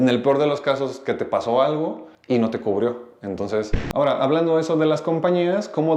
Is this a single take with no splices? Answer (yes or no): no